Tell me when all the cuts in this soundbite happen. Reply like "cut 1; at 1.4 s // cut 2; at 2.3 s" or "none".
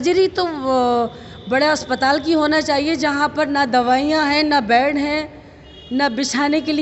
none